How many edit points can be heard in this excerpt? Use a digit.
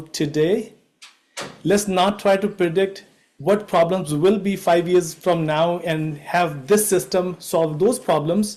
0